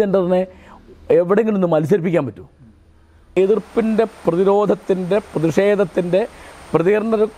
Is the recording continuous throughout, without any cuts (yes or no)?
no